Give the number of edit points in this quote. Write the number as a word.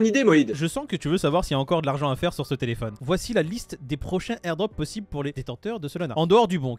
two